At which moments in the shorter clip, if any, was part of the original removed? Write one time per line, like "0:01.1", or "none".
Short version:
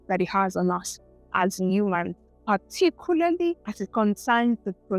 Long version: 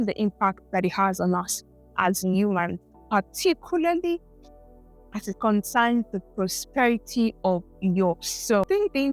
0:03.7